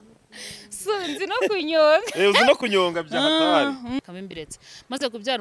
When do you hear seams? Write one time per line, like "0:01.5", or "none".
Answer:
0:04.0